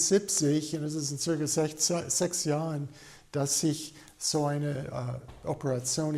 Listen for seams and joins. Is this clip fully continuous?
yes; 0 cuts

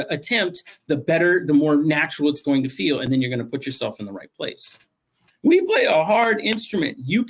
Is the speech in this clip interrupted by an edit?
yes; 1 cut; at 5.2 s

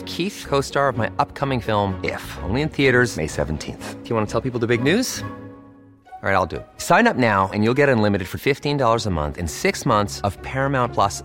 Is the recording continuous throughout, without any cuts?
yes; 0 cuts

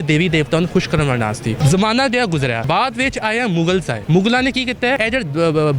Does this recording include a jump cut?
yes; 4 cuts; at 1.6 s, 2.6 s, 3.9 s, 5.0 s

